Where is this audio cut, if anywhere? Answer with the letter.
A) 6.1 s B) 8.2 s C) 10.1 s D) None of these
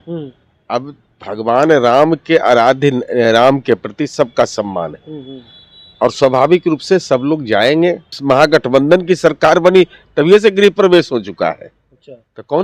B